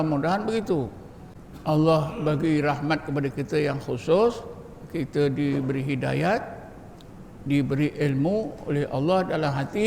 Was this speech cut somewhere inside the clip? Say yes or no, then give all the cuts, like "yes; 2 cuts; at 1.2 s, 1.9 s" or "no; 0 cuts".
no; 0 cuts